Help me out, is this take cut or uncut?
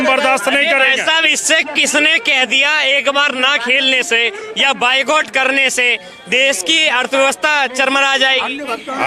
uncut